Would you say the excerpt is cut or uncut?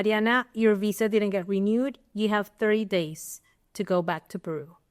uncut